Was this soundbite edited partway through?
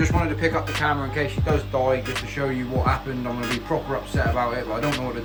no; 0 cuts

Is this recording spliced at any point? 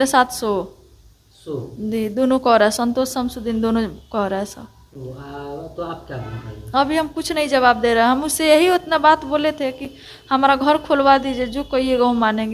no; 0 cuts

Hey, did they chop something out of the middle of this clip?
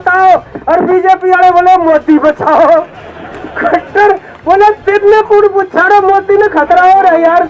no; 0 cuts

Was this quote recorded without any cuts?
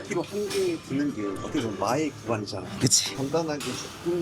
no; 2 cuts; at 1.4 s, 2.9 s

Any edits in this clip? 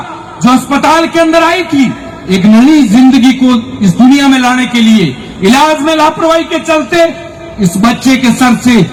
no; 0 cuts

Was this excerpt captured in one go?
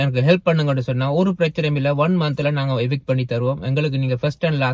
yes; 0 cuts

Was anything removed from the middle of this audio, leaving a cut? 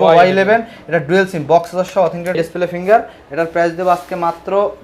yes; 1 cut; at 2.3 s

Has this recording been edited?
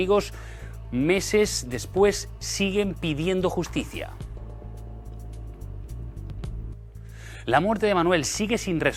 no; 0 cuts

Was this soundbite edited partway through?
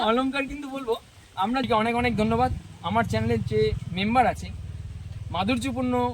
yes; 1 cut; at 1.7 s

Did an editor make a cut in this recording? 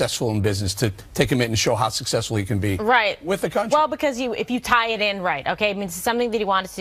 yes; 1 cut; at 3.5 s

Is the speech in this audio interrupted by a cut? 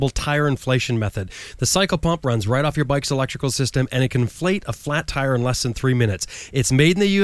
no; 0 cuts

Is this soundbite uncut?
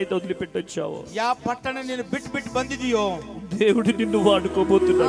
yes; 0 cuts

